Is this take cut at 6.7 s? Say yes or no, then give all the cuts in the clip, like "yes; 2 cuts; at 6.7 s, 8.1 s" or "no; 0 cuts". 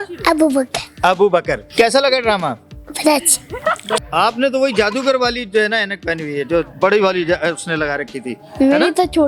no; 2 cuts; at 1.6 s, 3.9 s